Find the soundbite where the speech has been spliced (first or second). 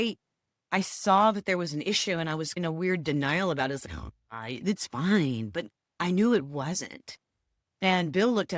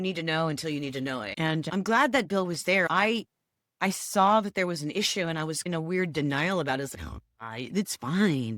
second